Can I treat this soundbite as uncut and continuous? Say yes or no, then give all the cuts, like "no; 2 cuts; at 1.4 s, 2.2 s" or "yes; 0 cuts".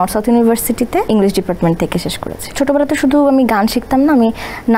no; 2 cuts; at 1.1 s, 2.5 s